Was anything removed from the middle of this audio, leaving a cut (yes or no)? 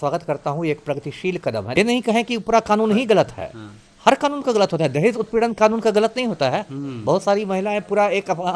yes